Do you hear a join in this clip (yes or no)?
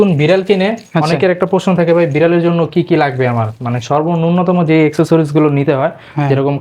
no